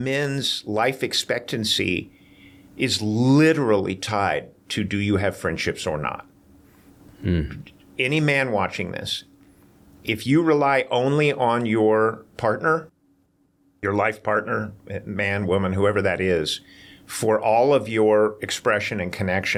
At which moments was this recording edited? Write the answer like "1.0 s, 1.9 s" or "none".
none